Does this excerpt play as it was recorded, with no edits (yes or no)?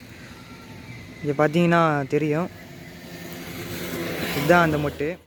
yes